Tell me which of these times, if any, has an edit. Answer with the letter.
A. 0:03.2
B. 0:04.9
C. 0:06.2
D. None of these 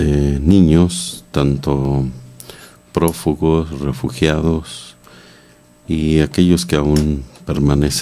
A